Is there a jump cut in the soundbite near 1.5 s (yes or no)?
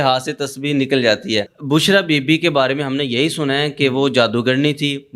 yes